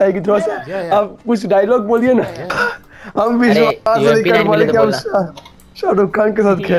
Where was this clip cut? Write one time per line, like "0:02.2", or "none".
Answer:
0:02.5